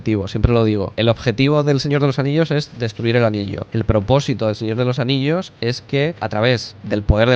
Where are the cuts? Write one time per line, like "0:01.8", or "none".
0:00.9
0:03.6
0:06.2